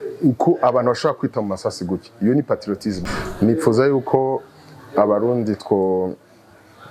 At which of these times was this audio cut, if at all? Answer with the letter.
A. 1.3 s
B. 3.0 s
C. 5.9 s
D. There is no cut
B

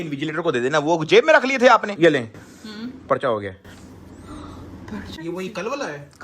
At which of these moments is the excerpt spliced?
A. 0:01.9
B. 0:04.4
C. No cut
A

